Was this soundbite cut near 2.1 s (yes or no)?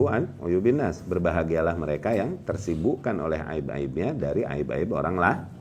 no